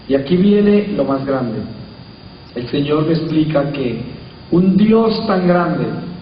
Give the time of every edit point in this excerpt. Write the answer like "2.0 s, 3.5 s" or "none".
none